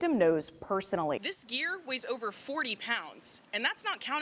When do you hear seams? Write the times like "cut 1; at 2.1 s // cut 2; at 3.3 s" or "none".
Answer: cut 1; at 1.2 s